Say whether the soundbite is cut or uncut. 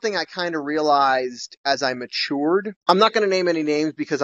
uncut